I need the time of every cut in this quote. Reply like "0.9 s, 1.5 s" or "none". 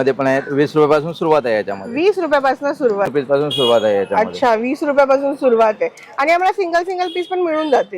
3.1 s